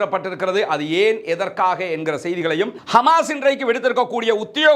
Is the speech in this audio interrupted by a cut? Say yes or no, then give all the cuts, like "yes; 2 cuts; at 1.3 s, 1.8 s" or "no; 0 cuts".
yes; 1 cut; at 2.8 s